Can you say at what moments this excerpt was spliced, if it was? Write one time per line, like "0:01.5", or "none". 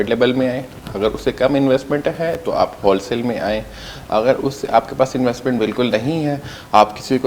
none